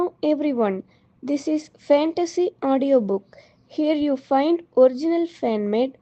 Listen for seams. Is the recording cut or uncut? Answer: uncut